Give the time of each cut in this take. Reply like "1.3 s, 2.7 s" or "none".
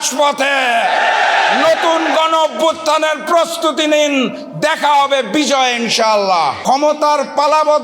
6.6 s